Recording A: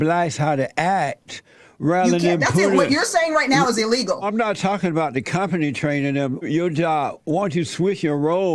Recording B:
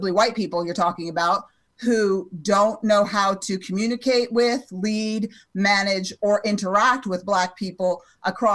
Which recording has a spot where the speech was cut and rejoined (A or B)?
A